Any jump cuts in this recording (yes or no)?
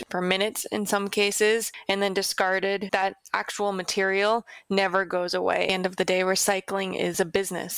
yes